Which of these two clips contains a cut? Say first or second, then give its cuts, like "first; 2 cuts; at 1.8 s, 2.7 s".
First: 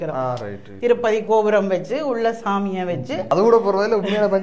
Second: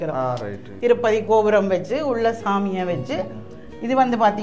first; 1 cut; at 3.2 s